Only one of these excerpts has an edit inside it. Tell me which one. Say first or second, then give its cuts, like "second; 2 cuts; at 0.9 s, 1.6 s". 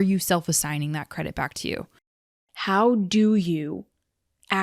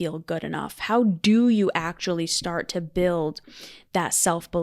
first; 1 cut; at 2.0 s